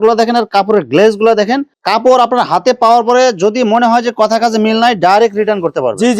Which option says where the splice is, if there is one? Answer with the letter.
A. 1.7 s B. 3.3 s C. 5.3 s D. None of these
A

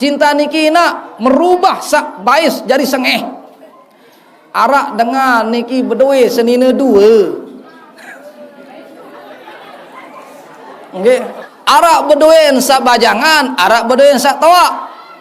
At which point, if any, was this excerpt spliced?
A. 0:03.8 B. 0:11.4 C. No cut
B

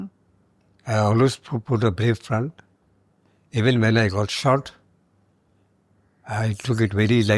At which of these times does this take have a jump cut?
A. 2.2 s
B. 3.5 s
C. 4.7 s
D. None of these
D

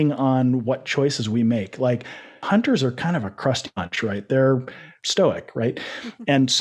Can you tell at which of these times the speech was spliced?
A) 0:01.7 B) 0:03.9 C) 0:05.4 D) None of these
D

